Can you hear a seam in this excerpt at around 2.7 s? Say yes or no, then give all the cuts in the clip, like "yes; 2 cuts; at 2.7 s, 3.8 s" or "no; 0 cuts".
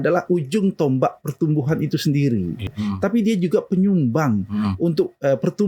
yes; 1 cut; at 2.7 s